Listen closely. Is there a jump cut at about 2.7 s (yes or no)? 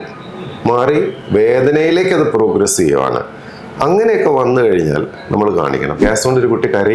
no